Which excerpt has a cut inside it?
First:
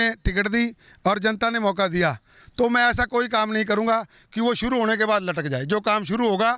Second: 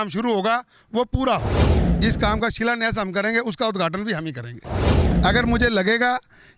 second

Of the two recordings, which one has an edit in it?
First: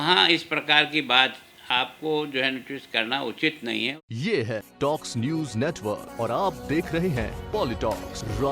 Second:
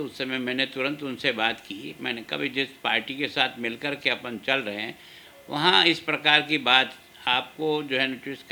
first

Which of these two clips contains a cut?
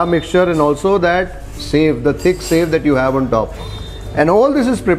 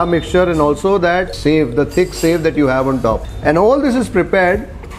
second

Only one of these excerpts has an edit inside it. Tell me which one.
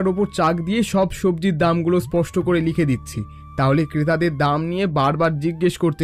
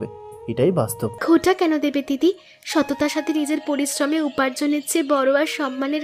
second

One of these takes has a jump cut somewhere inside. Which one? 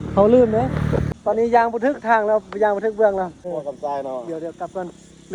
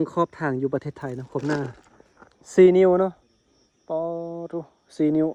first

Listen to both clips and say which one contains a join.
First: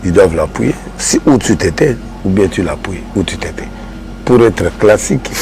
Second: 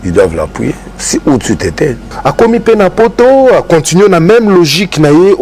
second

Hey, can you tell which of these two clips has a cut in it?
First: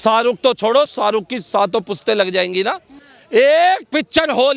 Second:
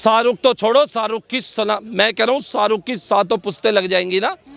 first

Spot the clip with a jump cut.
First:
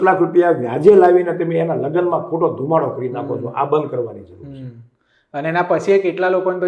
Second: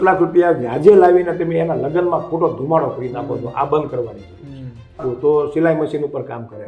second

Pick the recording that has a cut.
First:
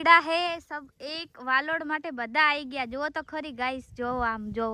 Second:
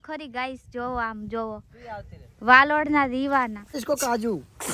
second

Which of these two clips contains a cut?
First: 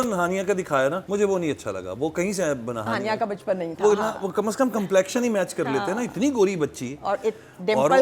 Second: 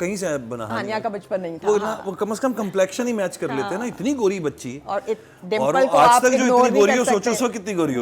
first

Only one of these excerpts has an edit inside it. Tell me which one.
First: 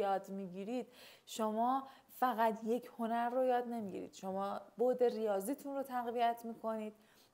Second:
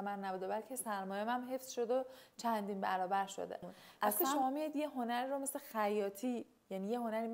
second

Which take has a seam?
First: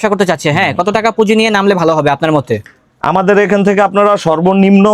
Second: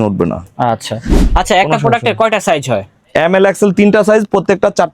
second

